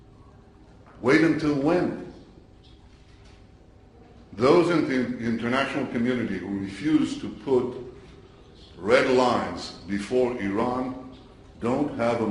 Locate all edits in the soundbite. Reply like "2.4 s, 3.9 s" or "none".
6.0 s